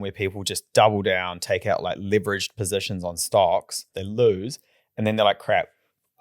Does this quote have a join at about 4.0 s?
yes; 1 cut; at 4.0 s

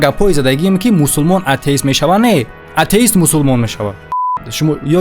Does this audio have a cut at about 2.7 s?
no; 1 cut; at 4.1 s

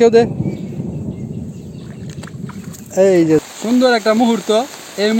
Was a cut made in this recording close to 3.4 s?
yes; 1 cut; at 3.4 s

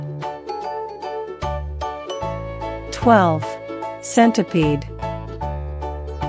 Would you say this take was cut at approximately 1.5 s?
no; 2 cuts; at 2.7 s, 4.8 s

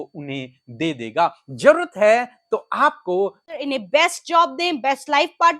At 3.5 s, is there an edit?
yes; 1 cut; at 3.5 s

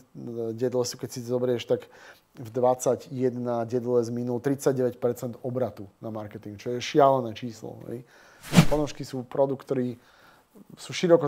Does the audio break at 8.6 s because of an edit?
yes; 1 cut; at 8.6 s

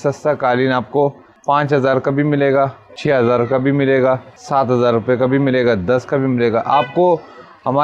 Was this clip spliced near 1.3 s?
yes; 3 cuts; at 1.3 s, 2.9 s, 4.3 s

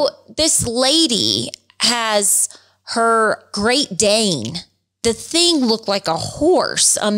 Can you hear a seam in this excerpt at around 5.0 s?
yes; 2 cuts; at 3.5 s, 5.0 s

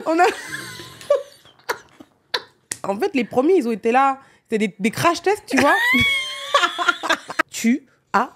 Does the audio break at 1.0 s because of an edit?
no; 2 cuts; at 2.8 s, 7.4 s

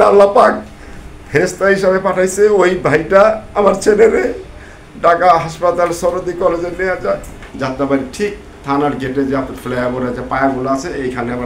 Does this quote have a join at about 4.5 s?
no; 1 cut; at 7.4 s

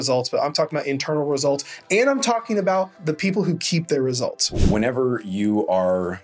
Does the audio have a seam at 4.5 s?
yes; 2 cuts; at 2.9 s, 4.5 s

